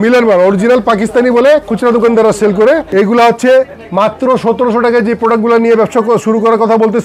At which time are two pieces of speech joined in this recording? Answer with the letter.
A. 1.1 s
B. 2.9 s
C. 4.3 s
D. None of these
B